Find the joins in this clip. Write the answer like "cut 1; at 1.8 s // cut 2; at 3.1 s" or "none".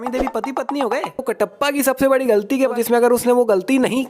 cut 1; at 1.3 s // cut 2; at 2.7 s